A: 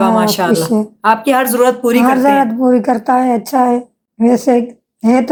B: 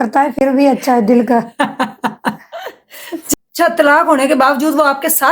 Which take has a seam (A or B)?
B